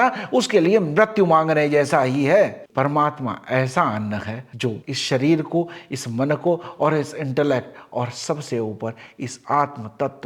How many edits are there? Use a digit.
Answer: 1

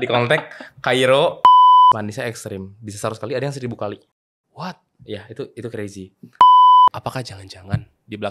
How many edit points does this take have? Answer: 4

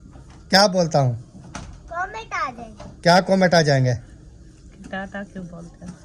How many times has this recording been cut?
0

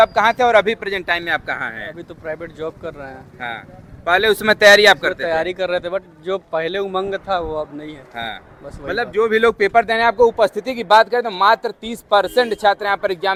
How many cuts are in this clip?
0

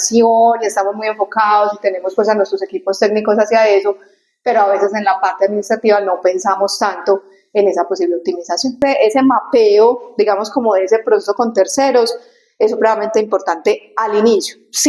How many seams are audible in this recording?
1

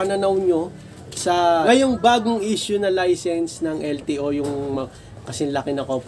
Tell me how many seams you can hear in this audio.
1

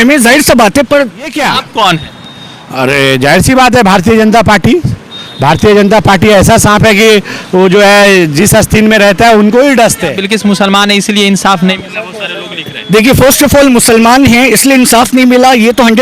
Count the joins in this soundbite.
2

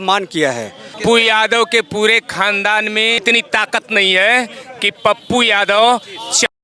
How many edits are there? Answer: 1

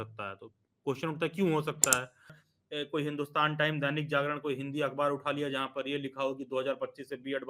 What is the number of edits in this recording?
1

